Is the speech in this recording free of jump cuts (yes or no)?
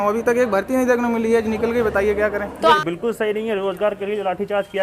no